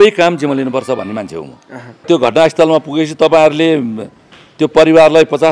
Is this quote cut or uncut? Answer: cut